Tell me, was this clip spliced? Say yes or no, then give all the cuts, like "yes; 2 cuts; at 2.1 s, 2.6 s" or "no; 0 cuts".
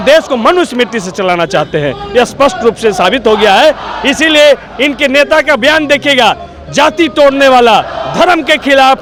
no; 0 cuts